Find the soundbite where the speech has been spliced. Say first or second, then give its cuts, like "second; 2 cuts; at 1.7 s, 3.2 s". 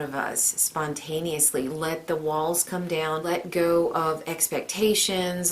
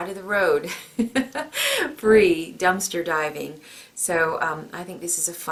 first; 1 cut; at 3.2 s